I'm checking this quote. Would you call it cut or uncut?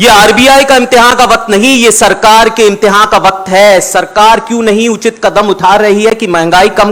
uncut